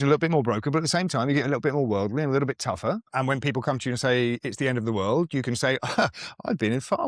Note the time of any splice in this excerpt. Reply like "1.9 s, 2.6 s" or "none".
3.1 s